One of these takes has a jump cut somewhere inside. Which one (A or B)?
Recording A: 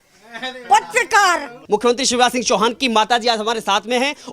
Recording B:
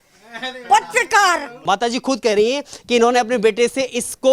A